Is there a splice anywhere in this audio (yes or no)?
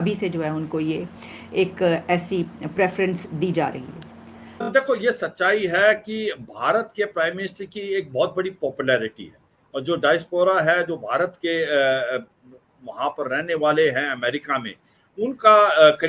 yes